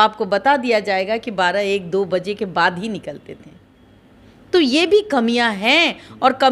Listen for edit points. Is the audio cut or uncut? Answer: uncut